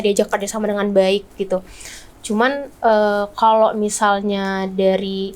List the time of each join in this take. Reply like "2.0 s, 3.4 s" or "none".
none